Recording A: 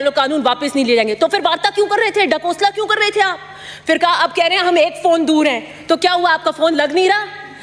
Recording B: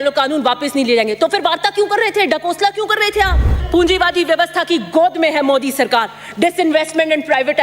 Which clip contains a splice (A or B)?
B